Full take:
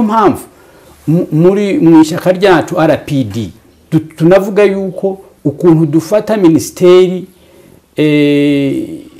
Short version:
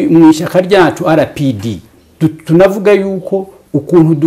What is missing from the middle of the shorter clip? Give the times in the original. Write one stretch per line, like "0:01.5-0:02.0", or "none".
none